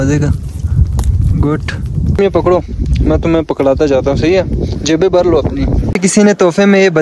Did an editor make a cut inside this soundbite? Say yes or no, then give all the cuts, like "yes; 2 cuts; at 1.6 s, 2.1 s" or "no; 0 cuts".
yes; 2 cuts; at 2.1 s, 6.0 s